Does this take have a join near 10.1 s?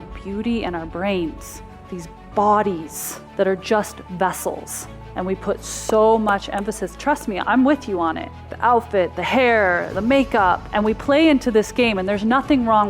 yes; 2 cuts; at 7.4 s, 10.1 s

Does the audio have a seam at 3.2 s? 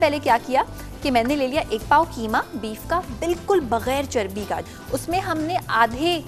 no; 1 cut; at 4.7 s

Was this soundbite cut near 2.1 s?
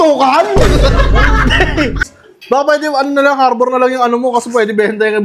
yes; 1 cut; at 2.1 s

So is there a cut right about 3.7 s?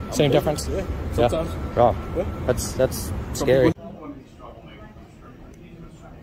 yes; 1 cut; at 3.7 s

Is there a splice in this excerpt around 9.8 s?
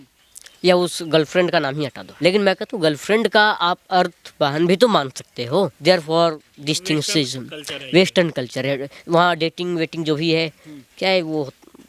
no; 2 cuts; at 2.0 s, 5.8 s

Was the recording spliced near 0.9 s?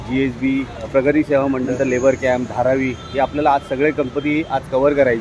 yes; 2 cuts; at 0.9 s, 1.7 s

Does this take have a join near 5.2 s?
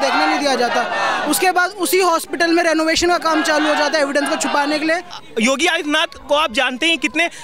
yes; 1 cut; at 5.2 s

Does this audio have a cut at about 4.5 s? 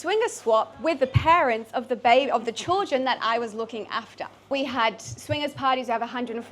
yes; 1 cut; at 4.5 s

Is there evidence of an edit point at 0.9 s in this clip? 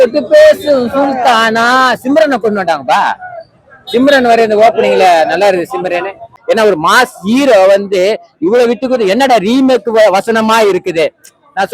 no; 1 cut; at 6.4 s

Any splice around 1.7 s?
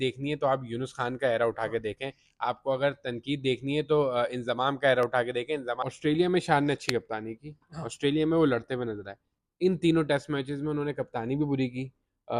no; 1 cut; at 5.9 s

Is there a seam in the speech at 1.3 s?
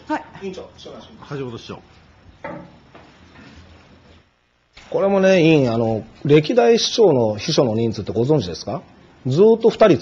yes; 1 cut; at 1.3 s

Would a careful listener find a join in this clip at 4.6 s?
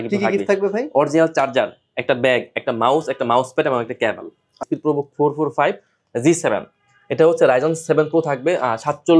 yes; 1 cut; at 4.6 s

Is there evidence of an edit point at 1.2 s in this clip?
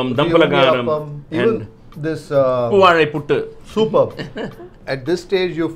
no; 0 cuts

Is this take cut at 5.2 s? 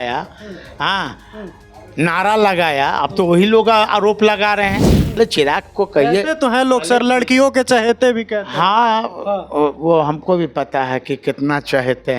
yes; 1 cut; at 5.2 s

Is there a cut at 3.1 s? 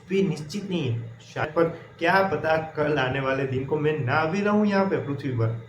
no; 1 cut; at 1.4 s

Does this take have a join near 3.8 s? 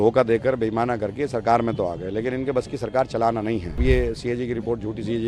yes; 1 cut; at 3.8 s

